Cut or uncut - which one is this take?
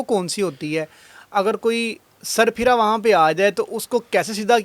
uncut